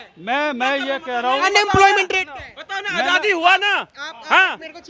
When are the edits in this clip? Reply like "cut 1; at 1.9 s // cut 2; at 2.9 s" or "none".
none